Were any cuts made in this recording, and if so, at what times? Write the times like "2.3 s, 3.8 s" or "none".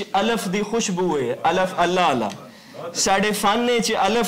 none